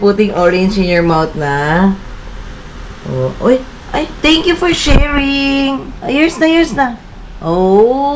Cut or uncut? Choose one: cut